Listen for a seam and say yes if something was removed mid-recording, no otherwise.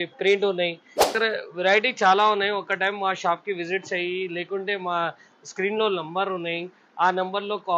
yes